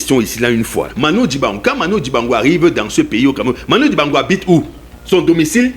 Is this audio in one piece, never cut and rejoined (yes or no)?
no